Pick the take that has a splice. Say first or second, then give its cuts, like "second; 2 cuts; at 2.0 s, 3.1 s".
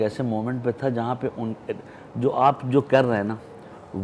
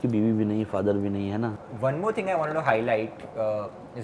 second; 1 cut; at 1.6 s